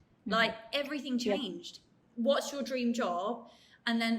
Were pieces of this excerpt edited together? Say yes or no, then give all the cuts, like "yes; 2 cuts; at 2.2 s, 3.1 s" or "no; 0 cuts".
yes; 1 cut; at 1.9 s